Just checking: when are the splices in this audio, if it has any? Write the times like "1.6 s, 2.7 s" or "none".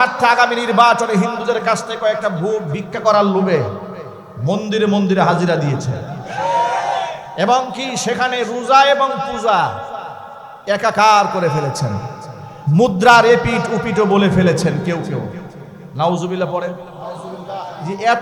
7.2 s